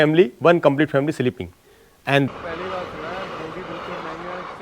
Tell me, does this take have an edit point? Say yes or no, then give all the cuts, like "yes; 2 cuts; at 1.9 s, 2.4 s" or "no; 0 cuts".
yes; 1 cut; at 2.3 s